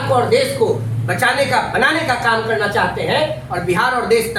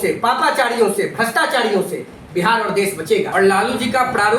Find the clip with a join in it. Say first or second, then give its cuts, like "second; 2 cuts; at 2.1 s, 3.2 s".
second; 1 cut; at 3.3 s